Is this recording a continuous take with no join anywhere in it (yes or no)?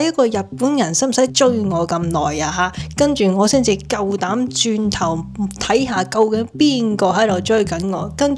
no